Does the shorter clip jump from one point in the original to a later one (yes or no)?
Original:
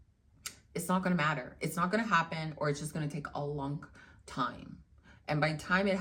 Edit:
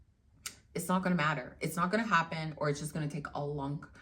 no